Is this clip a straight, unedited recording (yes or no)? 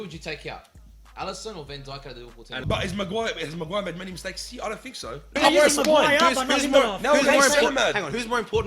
no